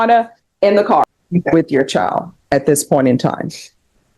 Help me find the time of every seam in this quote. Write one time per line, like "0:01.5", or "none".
0:01.2